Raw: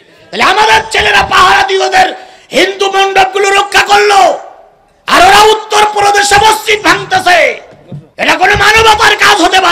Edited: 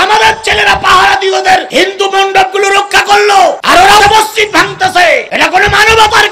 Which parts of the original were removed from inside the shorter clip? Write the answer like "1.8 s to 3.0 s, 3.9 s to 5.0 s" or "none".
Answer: 2.1 s to 2.5 s, 4.7 s to 6.2 s, 7.6 s to 8.2 s